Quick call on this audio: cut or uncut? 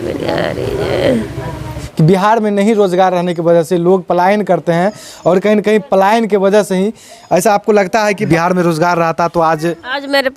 cut